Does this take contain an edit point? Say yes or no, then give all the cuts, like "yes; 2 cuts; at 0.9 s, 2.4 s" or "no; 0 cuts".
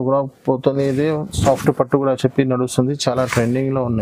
no; 0 cuts